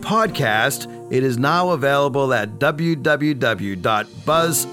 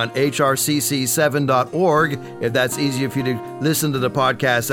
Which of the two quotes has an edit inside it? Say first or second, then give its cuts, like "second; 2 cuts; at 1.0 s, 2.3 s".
first; 1 cut; at 0.9 s